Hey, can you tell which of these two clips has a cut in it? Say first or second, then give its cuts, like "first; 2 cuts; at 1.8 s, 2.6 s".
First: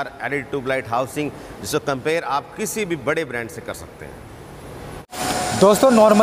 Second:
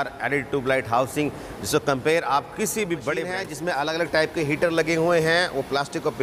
second; 1 cut; at 3.5 s